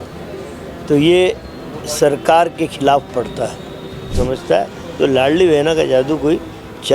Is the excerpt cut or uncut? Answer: cut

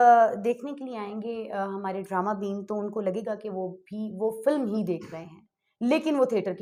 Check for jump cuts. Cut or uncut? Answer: uncut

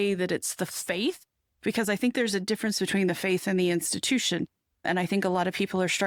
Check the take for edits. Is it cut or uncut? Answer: uncut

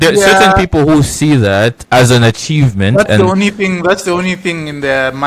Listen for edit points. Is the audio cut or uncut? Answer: uncut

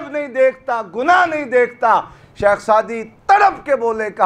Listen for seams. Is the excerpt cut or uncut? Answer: uncut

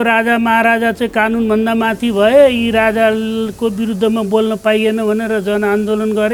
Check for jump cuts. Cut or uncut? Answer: uncut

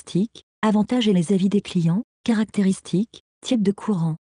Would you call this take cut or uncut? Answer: cut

